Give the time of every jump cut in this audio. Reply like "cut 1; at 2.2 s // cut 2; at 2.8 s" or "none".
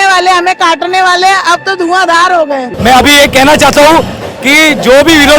cut 1; at 2.7 s